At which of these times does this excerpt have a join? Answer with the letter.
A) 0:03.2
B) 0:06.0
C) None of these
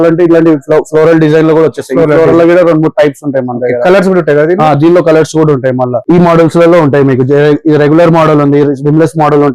B